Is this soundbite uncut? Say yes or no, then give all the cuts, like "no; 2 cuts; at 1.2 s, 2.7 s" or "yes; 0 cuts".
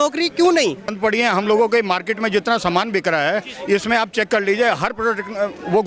no; 1 cut; at 0.9 s